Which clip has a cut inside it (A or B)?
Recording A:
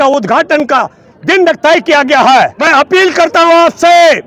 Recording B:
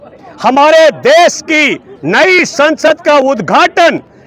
A